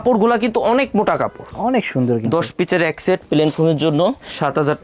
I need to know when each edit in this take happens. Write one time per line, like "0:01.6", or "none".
0:01.4